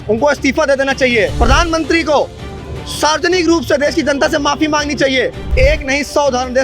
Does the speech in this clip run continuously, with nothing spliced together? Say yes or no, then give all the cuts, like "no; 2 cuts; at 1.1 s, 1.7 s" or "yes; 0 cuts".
no; 2 cuts; at 1.3 s, 5.4 s